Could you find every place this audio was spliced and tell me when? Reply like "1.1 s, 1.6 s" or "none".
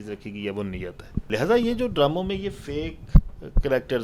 1.3 s